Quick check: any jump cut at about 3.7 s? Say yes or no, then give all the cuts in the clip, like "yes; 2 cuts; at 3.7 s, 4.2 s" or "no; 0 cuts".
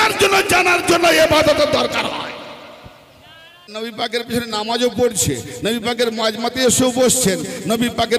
yes; 1 cut; at 3.7 s